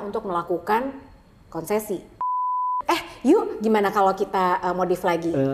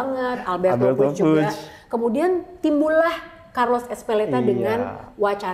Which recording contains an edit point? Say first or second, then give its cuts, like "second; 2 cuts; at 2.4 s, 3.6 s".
first; 1 cut; at 2.6 s